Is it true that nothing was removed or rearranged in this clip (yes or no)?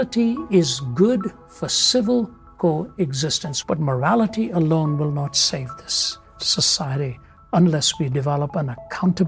no